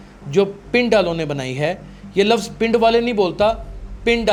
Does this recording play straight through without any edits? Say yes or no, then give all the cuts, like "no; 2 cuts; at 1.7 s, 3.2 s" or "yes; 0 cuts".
yes; 0 cuts